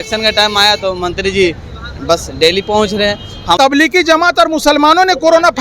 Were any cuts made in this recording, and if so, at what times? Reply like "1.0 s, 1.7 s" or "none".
3.6 s